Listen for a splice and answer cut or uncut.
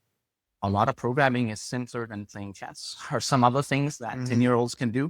uncut